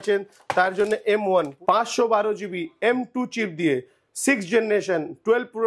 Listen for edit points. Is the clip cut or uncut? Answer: cut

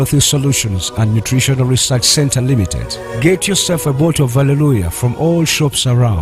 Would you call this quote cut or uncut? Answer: uncut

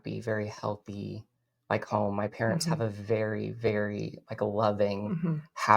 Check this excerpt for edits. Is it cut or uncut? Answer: uncut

